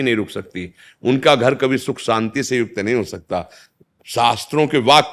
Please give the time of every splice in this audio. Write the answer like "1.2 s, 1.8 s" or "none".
3.6 s